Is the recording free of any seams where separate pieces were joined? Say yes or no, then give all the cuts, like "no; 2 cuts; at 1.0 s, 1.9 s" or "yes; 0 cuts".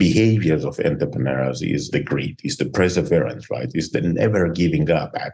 no; 1 cut; at 1.9 s